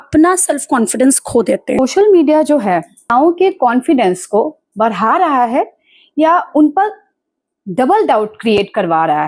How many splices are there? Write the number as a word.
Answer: two